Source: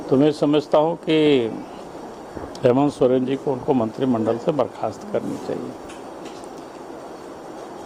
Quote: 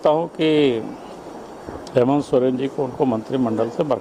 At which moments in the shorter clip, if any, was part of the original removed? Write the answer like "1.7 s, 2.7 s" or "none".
none